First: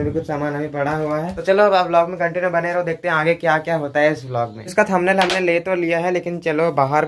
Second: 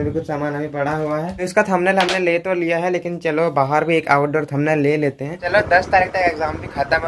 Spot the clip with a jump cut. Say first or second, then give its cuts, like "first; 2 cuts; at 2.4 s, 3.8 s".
second; 2 cuts; at 1.4 s, 5.4 s